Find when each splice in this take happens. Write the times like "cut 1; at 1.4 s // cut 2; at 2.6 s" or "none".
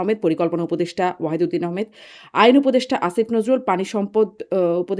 none

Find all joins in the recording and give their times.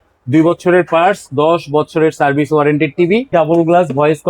cut 1; at 3.3 s

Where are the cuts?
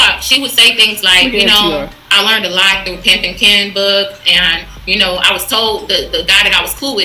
none

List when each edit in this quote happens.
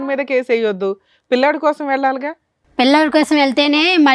none

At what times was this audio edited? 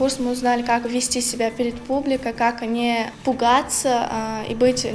cut 1; at 3.1 s

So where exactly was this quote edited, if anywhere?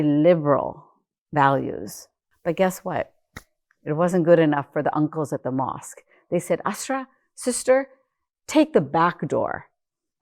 cut 1; at 2.3 s

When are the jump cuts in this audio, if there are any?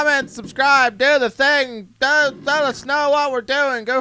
none

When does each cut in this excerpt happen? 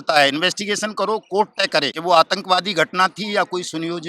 cut 1; at 1.9 s

